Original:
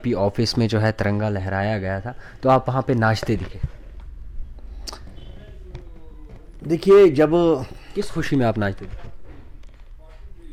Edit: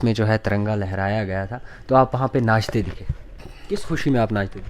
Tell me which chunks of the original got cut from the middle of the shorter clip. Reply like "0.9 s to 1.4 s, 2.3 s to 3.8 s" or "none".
4.1 s to 7.8 s